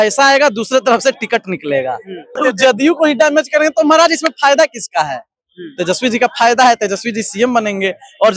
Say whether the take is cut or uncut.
cut